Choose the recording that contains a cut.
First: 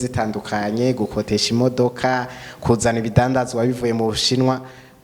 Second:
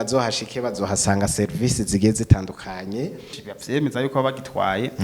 second; 1 cut; at 3.4 s

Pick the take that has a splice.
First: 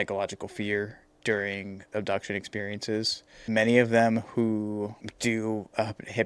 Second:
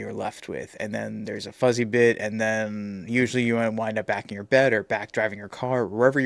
first; 3 cuts; at 1.9 s, 3.5 s, 5.0 s

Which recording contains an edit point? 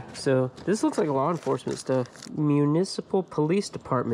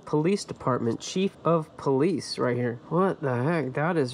first; 1 cut; at 2.3 s

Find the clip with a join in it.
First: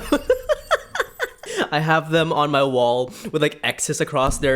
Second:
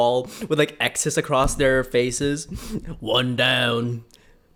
first; 1 cut; at 1.5 s

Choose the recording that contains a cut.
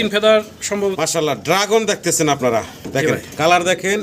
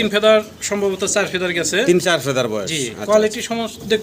first; 1 cut; at 1.0 s

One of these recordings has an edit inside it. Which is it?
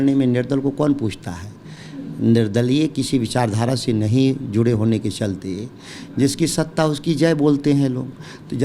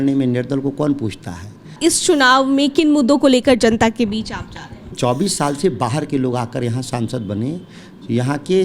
second; 2 cuts; at 1.8 s, 4.9 s

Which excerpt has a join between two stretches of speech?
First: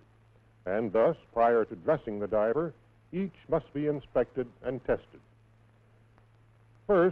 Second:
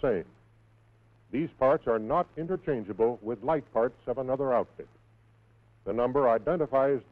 first; 1 cut; at 4.0 s

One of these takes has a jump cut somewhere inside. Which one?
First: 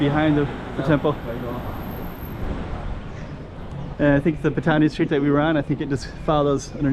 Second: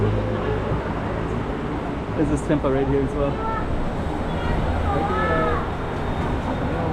first; 1 cut; at 3.0 s

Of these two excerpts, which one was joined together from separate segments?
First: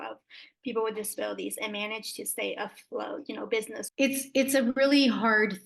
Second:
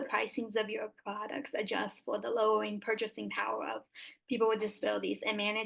first; 1 cut; at 3.8 s

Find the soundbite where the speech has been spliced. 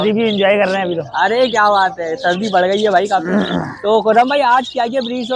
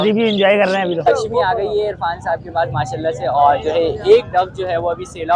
second; 1 cut; at 1.1 s

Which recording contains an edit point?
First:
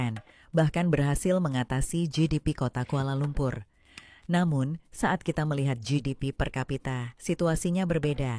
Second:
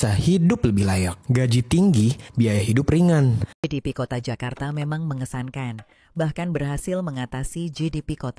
second; 1 cut; at 3.4 s

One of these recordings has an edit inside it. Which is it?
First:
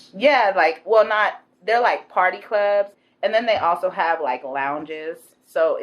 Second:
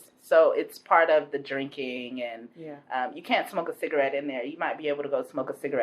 first; 1 cut; at 2.9 s

